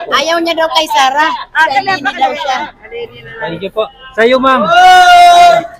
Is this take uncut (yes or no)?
yes